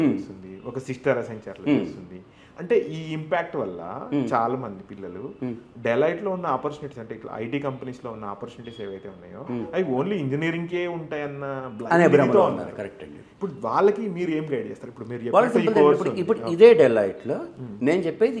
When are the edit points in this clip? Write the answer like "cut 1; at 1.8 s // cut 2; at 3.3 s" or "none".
none